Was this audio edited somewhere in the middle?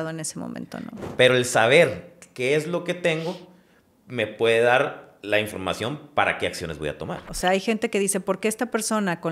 yes; 2 cuts; at 1.1 s, 7.2 s

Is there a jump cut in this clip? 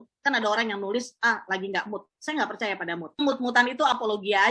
yes; 1 cut; at 3.2 s

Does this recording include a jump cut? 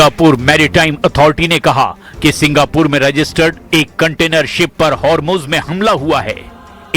yes; 1 cut; at 2.9 s

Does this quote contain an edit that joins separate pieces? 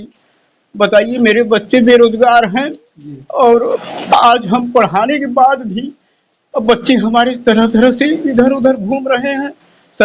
no; 0 cuts

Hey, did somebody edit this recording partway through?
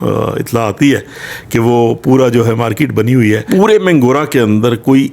yes; 1 cut; at 3.4 s

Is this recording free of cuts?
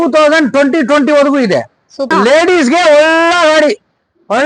no; 1 cut; at 2.1 s

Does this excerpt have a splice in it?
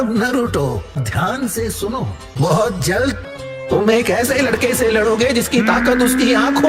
yes; 1 cut; at 3.2 s

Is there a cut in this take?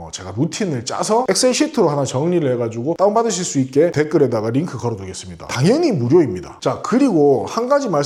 no; 0 cuts

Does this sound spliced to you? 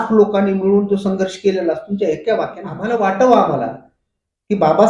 yes; 1 cut; at 2.7 s

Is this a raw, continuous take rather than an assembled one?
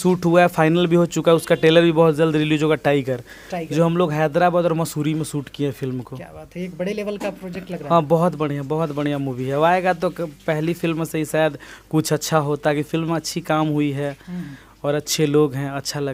yes; 0 cuts

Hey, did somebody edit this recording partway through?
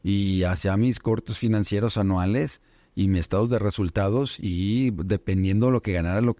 no; 0 cuts

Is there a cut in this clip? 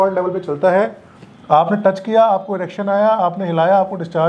no; 0 cuts

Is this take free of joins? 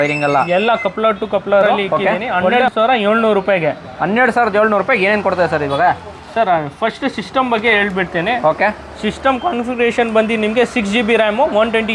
no; 1 cut; at 2.2 s

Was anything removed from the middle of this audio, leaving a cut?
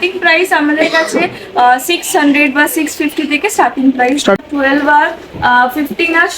yes; 1 cut; at 4.4 s

